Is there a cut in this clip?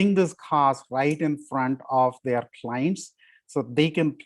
no; 0 cuts

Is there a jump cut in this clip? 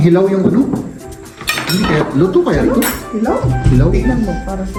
no; 0 cuts

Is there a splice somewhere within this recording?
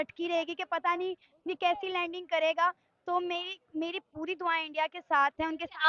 no; 0 cuts

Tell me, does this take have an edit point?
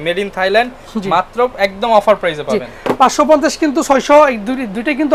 no; 0 cuts

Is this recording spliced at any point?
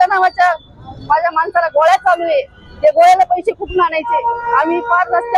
no; 0 cuts

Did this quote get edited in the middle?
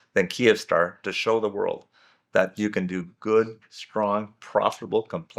no; 0 cuts

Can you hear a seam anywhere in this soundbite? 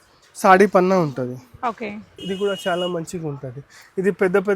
yes; 1 cut; at 2.1 s

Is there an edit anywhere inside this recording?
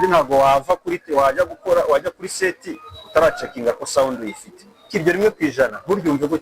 yes; 1 cut; at 4.9 s

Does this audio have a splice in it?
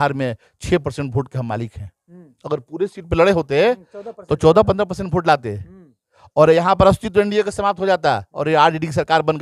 no; 0 cuts

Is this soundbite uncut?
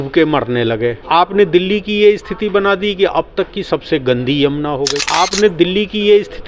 yes; 0 cuts

